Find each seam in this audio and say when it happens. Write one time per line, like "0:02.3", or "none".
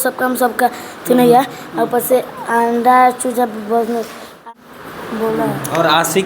0:04.5